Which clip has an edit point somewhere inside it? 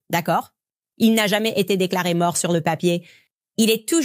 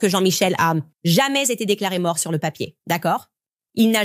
second; 1 cut; at 0.9 s

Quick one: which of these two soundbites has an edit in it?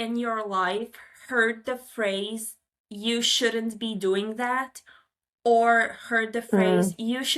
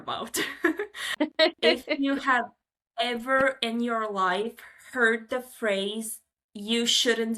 second; 1 cut; at 1.1 s

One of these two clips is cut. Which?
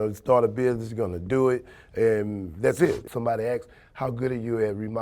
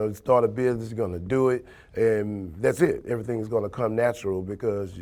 first; 1 cut; at 3.0 s

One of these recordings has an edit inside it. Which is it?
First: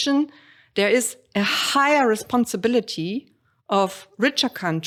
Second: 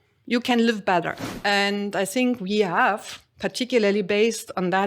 second; 1 cut; at 1.2 s

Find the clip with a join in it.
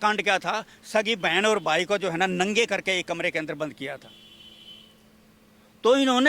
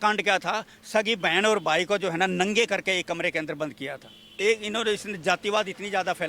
second; 1 cut; at 4.3 s

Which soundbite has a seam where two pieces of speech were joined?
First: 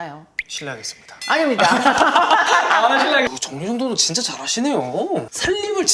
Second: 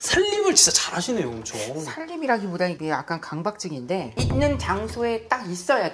first; 1 cut; at 3.3 s

